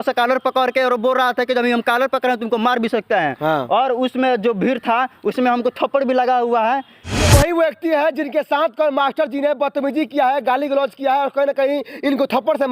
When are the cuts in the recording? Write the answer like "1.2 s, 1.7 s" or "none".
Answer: 7.0 s